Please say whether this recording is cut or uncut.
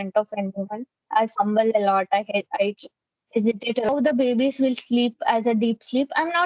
cut